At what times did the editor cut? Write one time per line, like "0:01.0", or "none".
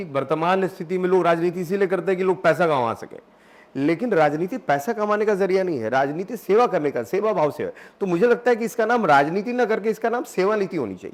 none